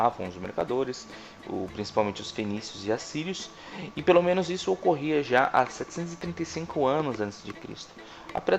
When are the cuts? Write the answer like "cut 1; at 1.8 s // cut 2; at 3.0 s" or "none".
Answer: cut 1; at 1.7 s